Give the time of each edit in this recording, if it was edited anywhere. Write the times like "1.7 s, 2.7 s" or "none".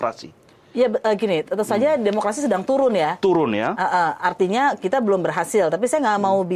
none